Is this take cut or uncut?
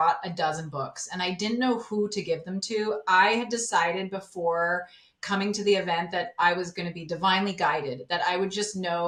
uncut